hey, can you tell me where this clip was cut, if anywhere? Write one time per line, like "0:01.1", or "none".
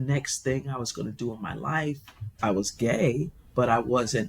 0:02.3